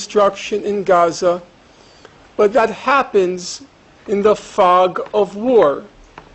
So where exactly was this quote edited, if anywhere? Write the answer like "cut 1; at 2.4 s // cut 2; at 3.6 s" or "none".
none